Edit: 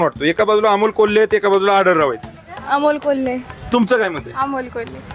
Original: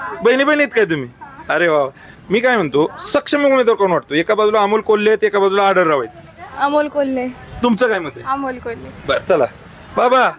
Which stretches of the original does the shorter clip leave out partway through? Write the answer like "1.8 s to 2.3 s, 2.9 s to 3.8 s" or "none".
none